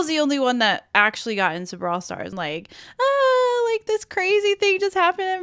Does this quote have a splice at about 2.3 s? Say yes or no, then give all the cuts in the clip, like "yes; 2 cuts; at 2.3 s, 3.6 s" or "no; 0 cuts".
yes; 1 cut; at 2.3 s